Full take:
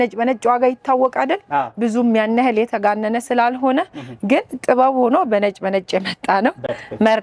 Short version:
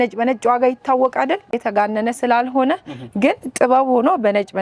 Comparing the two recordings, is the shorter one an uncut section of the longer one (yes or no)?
no